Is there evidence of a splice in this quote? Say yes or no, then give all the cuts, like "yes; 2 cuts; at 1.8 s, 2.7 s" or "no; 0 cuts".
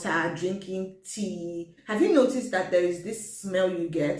yes; 1 cut; at 1.8 s